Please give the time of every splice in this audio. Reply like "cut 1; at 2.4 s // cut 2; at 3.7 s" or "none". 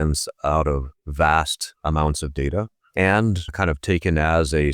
cut 1; at 1.0 s // cut 2; at 1.6 s // cut 3; at 2.8 s // cut 4; at 3.5 s